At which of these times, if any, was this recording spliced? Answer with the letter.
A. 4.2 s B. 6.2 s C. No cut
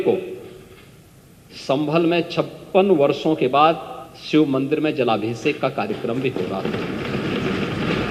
C